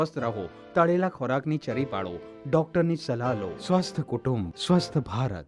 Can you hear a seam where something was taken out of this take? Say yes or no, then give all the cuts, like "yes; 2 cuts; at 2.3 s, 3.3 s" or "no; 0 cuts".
yes; 2 cuts; at 3.5 s, 4.5 s